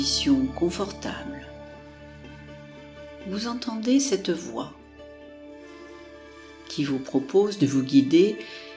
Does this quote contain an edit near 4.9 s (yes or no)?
no